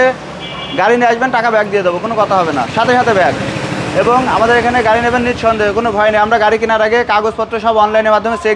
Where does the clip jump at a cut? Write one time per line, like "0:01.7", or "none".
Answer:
none